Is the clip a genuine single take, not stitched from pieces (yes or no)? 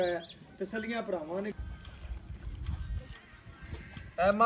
no